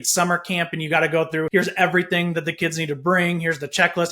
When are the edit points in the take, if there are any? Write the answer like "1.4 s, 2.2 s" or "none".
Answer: 1.5 s